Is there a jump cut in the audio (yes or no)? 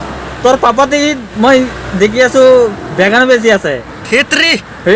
no